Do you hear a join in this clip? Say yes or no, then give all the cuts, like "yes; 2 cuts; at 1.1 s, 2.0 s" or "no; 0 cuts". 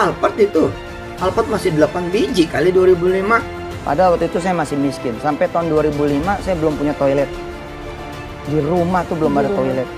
no; 0 cuts